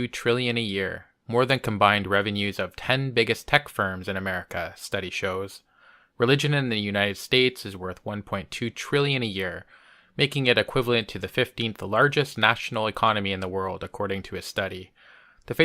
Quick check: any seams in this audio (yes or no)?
yes